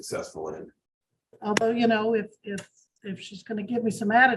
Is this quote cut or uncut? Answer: cut